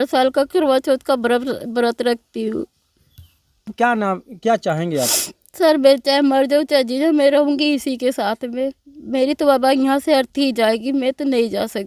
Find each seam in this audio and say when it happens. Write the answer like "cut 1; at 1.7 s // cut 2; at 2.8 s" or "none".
cut 1; at 3.7 s